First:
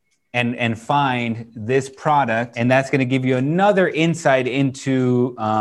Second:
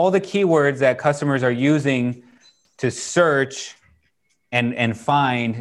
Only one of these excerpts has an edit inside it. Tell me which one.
first; 1 cut; at 2.5 s

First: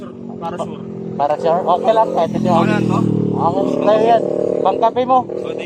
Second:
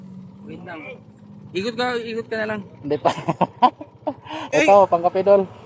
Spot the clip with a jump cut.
second; 1 cut; at 4.4 s

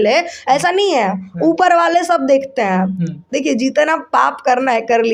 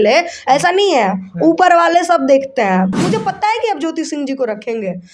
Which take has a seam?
second; 1 cut; at 2.9 s

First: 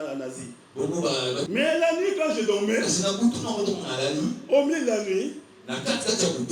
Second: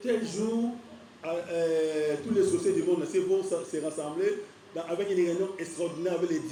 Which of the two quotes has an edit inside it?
first; 1 cut; at 1.5 s

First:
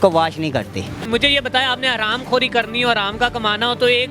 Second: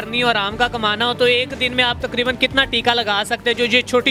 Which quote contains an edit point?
first; 1 cut; at 1.0 s

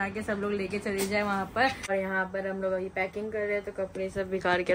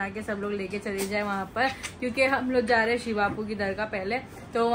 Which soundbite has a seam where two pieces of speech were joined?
first; 1 cut; at 1.9 s

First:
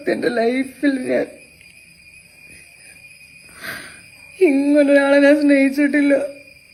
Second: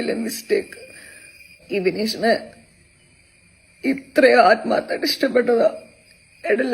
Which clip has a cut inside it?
second; 1 cut; at 1.6 s

